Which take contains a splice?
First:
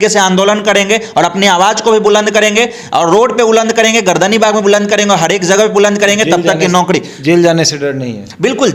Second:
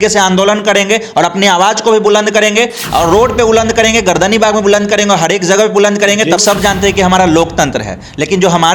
second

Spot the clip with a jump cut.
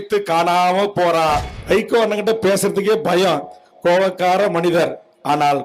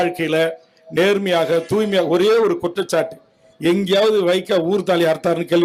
first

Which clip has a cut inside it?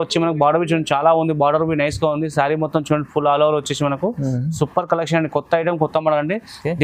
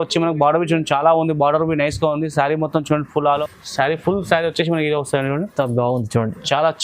second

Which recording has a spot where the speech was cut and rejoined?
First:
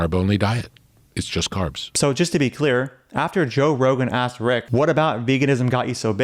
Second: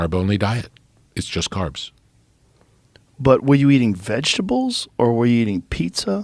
first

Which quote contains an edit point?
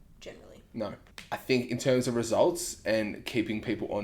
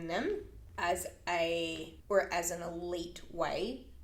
first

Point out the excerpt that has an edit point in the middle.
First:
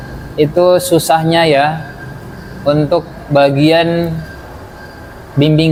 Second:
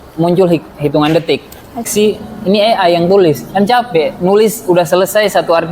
second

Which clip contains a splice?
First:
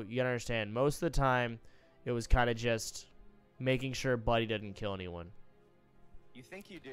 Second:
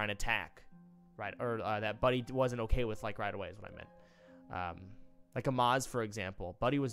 second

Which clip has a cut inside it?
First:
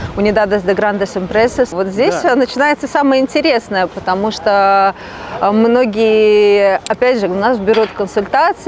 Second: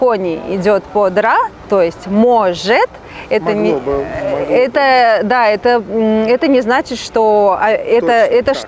first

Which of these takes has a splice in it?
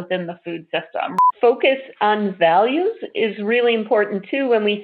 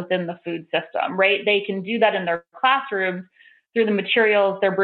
first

